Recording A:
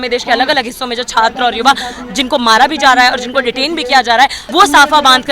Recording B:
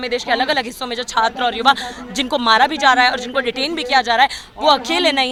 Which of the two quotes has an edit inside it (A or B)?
A